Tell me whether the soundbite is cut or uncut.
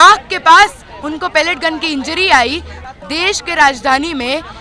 cut